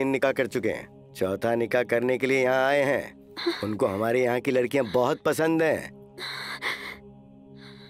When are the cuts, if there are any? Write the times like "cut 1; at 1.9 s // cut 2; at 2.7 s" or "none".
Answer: none